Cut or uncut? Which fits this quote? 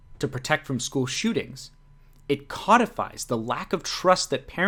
uncut